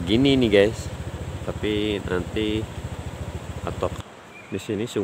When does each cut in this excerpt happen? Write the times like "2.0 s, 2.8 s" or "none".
3.9 s